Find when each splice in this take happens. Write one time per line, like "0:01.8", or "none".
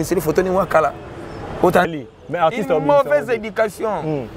0:01.9